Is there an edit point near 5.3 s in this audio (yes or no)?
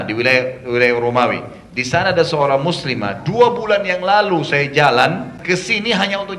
yes